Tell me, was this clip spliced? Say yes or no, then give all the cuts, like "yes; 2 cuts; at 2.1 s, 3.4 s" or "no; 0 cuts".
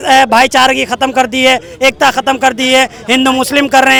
no; 0 cuts